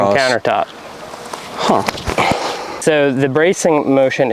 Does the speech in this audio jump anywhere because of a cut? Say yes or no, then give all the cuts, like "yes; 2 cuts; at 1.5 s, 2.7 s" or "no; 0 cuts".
yes; 1 cut; at 2.8 s